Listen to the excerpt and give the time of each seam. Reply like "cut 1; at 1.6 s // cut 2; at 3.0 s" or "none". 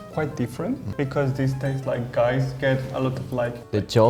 none